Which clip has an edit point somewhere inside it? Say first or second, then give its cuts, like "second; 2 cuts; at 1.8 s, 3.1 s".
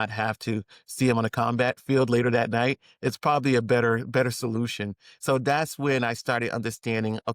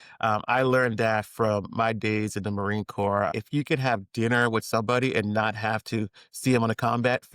second; 1 cut; at 3.3 s